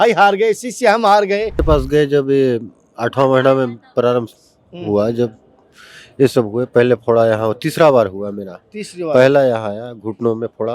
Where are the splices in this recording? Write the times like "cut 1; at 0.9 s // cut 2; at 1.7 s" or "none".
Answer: cut 1; at 1.6 s